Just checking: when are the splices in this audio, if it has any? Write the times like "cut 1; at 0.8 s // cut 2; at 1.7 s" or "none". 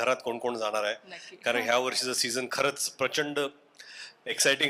none